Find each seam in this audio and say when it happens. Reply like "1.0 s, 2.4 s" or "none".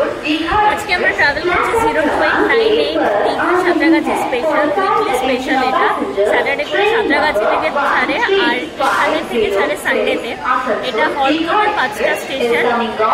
none